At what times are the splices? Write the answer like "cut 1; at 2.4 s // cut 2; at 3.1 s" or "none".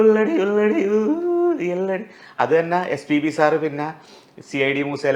none